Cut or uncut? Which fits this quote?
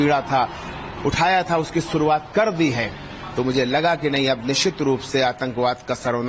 uncut